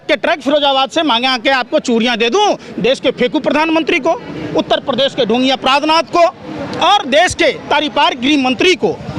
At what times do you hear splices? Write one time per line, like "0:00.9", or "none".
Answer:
none